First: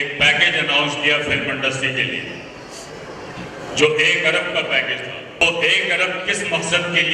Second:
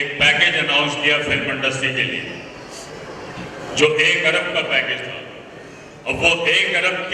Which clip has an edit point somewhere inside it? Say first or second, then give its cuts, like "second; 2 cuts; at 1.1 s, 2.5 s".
first; 1 cut; at 5.4 s